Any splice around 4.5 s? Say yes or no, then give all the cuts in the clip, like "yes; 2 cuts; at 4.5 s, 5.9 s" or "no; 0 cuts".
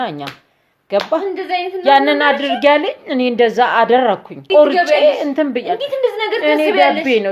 yes; 1 cut; at 4.5 s